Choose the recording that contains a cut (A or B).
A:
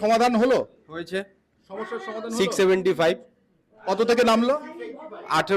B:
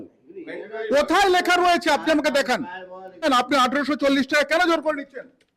B